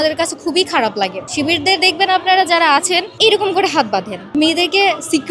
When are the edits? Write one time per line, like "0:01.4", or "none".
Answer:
0:01.2
0:03.1
0:04.3